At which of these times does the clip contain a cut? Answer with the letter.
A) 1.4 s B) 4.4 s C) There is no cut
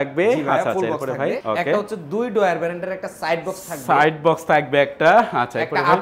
A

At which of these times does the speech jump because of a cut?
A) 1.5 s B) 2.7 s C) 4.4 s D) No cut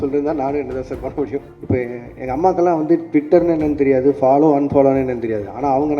A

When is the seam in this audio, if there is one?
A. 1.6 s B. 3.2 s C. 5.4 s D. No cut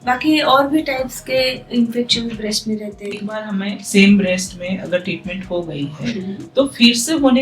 B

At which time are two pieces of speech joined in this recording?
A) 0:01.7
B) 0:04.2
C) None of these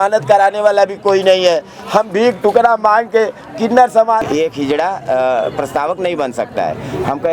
B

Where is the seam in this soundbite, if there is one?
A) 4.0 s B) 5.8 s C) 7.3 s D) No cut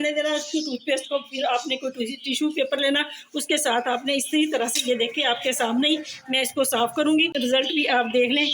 C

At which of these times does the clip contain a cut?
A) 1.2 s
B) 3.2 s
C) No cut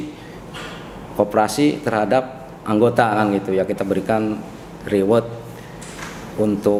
C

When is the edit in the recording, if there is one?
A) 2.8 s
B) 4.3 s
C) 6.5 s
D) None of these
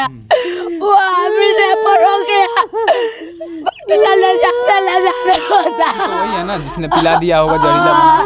C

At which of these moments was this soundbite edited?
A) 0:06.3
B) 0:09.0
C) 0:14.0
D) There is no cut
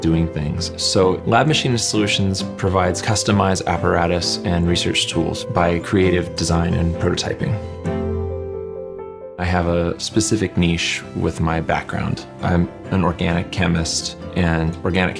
B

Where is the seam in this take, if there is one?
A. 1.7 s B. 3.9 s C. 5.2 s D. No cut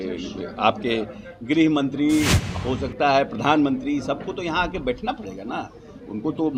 D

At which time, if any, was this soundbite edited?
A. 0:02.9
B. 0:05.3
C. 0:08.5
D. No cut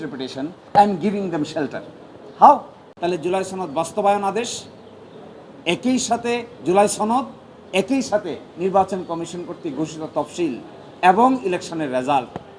A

